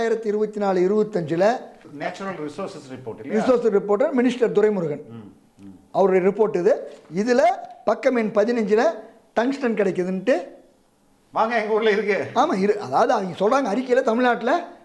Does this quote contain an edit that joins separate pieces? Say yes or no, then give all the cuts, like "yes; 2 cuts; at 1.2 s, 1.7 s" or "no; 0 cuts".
no; 0 cuts